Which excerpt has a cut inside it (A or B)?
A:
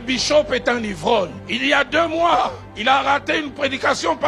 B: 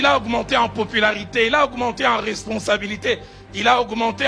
A